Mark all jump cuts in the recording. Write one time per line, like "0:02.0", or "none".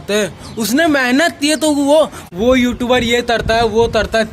0:02.2